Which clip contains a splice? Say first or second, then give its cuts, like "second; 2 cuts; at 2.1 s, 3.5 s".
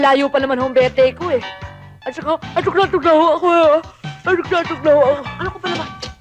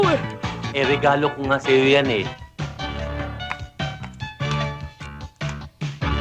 second; 1 cut; at 2.4 s